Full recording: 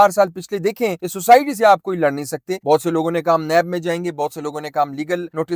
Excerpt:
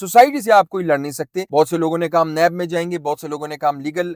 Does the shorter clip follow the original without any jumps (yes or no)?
yes